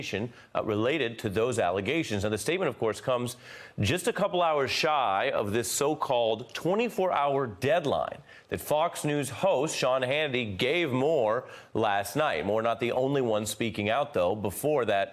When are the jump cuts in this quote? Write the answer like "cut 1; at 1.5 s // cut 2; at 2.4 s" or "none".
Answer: cut 1; at 12.4 s